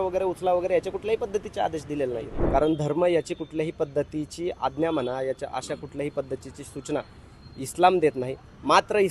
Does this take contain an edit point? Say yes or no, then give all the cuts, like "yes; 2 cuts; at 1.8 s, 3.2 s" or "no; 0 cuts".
yes; 1 cut; at 2.4 s